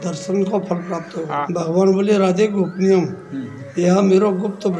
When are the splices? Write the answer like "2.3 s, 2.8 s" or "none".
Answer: 1.4 s